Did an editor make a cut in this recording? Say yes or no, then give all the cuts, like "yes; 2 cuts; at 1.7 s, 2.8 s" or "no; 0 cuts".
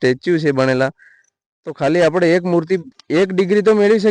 yes; 1 cut; at 2.9 s